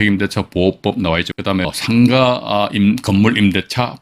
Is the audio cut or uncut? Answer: cut